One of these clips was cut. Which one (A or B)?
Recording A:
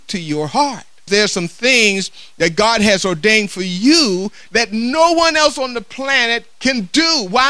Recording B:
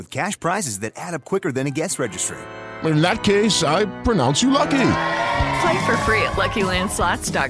A